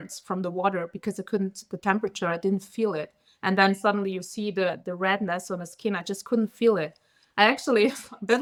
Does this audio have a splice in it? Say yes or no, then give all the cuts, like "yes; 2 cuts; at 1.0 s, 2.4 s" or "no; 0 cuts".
no; 0 cuts